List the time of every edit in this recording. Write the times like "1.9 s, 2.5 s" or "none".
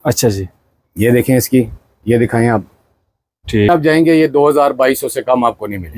3.7 s